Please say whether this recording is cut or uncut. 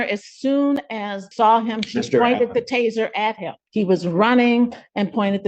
cut